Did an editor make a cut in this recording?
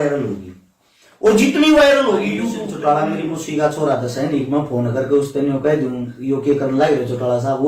yes; 1 cut; at 2.7 s

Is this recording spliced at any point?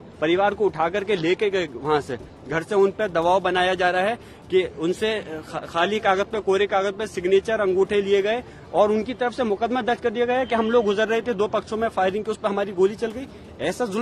no; 0 cuts

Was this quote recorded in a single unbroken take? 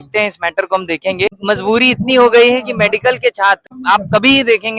no; 2 cuts; at 1.3 s, 3.8 s

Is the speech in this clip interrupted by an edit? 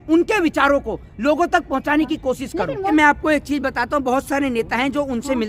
no; 0 cuts

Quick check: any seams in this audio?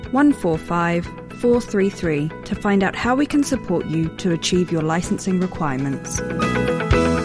yes; 1 cut; at 6.2 s

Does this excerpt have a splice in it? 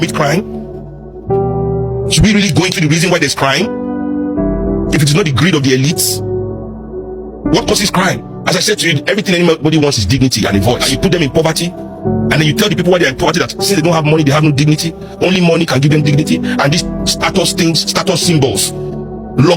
no; 0 cuts

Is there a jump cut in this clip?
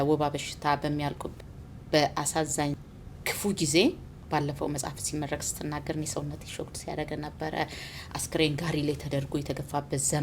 yes; 2 cuts; at 1.3 s, 2.8 s

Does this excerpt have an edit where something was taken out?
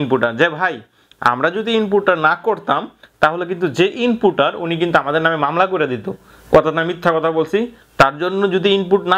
no; 0 cuts

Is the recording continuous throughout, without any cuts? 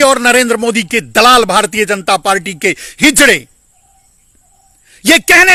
yes; 0 cuts

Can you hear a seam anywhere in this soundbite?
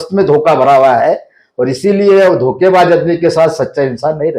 no; 0 cuts

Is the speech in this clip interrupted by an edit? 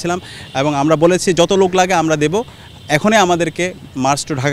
no; 0 cuts

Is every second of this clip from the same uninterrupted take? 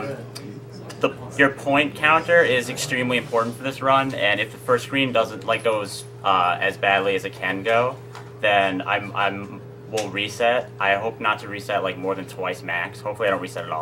yes; 0 cuts

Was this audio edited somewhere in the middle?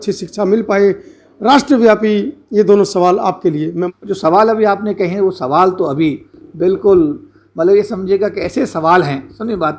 yes; 1 cut; at 3.8 s

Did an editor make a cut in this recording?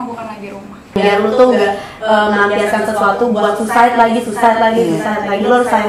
yes; 1 cut; at 1.0 s

